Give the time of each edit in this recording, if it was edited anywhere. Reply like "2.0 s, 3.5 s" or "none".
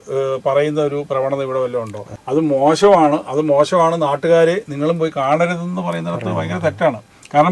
2.1 s